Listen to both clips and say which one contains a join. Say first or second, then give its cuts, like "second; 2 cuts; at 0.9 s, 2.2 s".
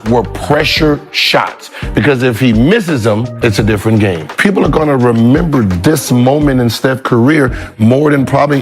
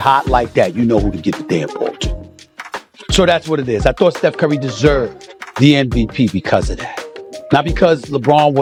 first; 2 cuts; at 3.3 s, 4.3 s